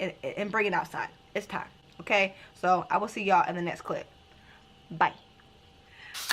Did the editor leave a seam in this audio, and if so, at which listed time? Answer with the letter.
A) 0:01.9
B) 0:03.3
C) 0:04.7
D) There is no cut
D